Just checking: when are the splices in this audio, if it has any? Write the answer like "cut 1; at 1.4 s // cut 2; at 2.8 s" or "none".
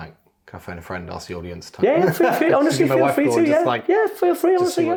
none